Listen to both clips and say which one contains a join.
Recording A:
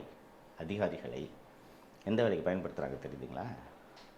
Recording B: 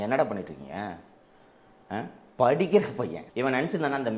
B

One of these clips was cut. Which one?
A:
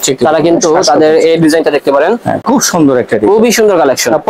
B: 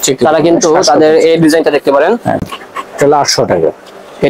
B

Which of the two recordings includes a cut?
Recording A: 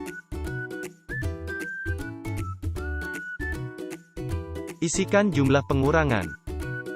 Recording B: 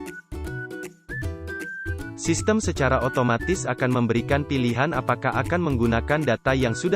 B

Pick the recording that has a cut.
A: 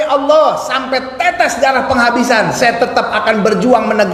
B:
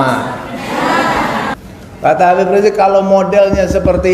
B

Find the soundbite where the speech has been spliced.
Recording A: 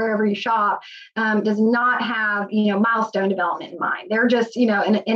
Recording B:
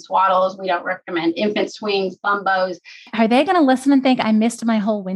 B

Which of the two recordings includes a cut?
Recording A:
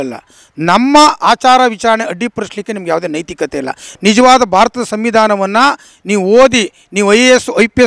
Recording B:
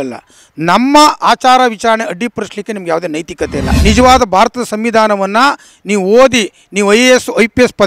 B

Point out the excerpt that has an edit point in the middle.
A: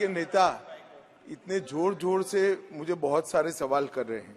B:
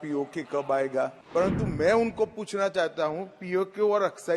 B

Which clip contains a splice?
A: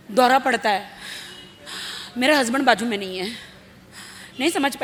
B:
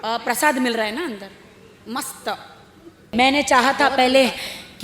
B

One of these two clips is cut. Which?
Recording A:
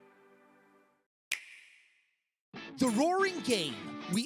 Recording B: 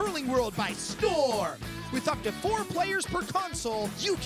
A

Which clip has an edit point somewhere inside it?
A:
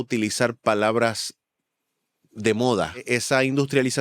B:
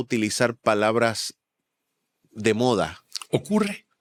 A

